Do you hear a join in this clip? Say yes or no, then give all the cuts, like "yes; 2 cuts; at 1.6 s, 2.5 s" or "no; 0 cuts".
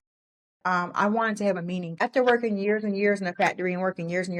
yes; 1 cut; at 2.0 s